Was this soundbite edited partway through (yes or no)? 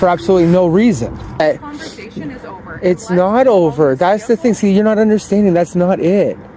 yes